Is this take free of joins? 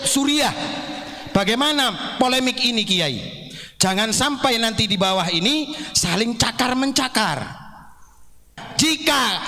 no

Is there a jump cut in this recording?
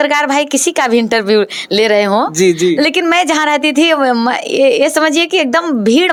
no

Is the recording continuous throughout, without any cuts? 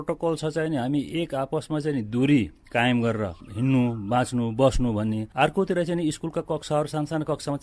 no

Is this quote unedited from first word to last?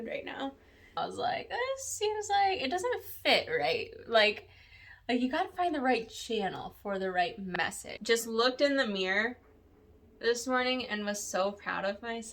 no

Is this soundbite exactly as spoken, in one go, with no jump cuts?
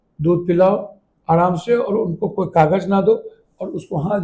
yes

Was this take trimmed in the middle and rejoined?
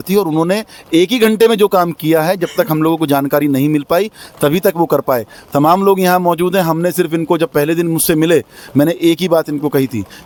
no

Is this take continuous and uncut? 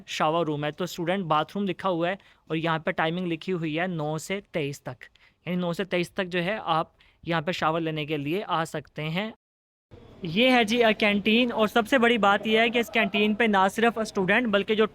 no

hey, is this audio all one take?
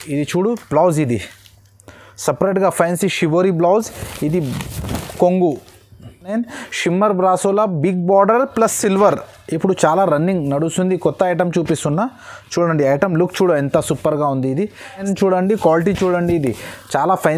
no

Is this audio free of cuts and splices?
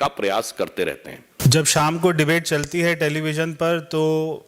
yes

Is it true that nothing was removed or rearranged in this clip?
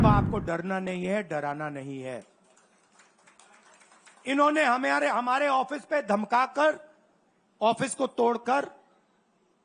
yes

